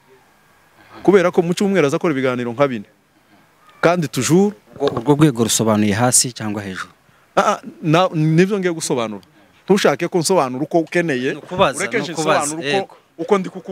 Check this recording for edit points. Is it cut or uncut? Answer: uncut